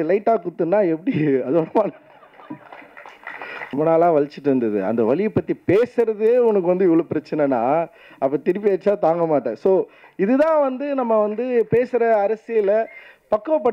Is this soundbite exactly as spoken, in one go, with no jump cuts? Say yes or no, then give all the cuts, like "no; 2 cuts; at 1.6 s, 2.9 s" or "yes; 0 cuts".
no; 1 cut; at 3.7 s